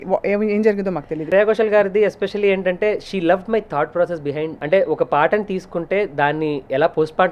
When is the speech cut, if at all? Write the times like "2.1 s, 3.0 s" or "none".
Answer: 1.2 s, 4.6 s